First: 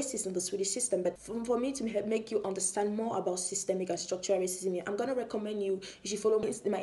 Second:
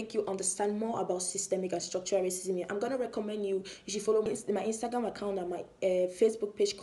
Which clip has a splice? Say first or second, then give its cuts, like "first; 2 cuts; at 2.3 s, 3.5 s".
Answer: first; 1 cut; at 1.2 s